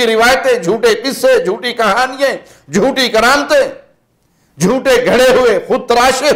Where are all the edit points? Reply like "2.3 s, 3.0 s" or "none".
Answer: none